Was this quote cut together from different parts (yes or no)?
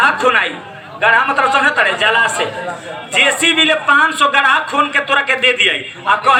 no